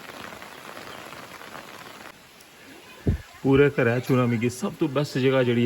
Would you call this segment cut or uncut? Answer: cut